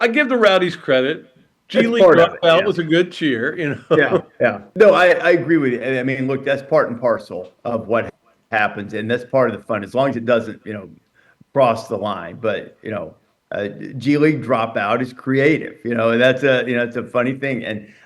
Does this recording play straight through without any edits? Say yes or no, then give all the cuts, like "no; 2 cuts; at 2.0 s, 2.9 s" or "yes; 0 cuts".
no; 1 cut; at 4.6 s